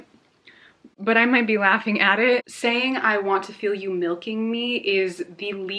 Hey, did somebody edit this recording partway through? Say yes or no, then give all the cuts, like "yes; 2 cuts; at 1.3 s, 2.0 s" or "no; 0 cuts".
yes; 1 cut; at 2.4 s